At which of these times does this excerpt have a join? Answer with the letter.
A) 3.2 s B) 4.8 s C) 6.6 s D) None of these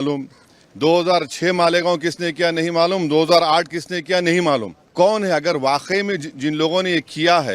B